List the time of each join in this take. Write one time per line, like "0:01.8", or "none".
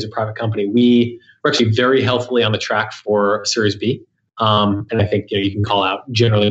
none